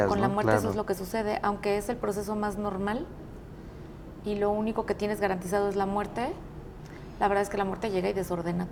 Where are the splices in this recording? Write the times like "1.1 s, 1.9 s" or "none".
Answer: none